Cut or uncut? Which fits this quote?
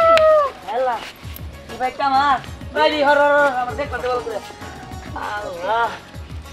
uncut